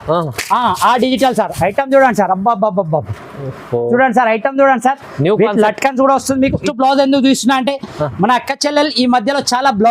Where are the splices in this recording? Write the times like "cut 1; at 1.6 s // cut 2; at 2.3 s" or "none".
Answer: cut 1; at 6.6 s